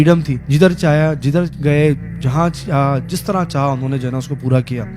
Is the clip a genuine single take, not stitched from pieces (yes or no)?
yes